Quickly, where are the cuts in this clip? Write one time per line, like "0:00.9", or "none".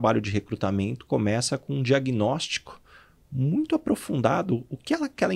none